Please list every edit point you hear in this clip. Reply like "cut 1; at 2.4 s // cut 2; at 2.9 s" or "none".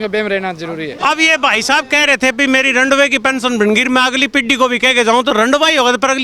cut 1; at 1.0 s